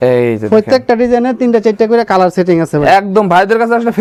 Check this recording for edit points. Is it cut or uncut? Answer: uncut